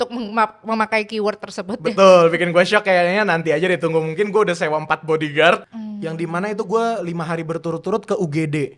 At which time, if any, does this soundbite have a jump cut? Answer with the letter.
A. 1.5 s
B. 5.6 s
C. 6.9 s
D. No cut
B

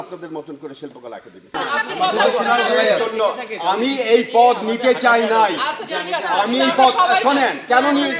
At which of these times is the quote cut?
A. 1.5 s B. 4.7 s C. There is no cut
A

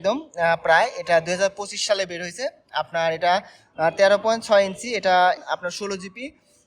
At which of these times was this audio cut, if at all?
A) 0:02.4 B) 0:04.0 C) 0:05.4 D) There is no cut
C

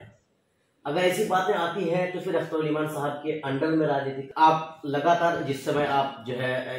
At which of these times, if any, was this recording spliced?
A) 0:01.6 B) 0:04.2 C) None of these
B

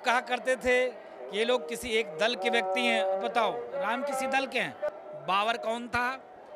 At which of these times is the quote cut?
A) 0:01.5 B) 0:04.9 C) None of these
B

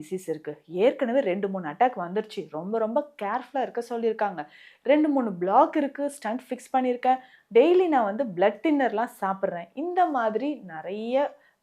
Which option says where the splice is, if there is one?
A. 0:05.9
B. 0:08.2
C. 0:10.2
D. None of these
D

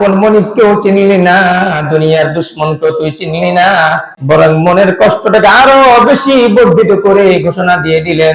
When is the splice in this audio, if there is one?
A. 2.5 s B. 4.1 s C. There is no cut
B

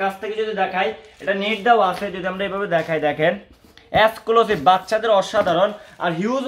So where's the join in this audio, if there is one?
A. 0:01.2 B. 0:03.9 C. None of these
C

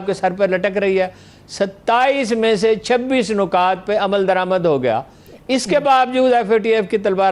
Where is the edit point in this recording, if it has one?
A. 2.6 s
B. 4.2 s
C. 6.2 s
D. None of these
D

